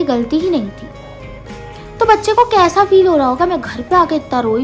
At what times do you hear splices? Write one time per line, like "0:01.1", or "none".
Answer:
none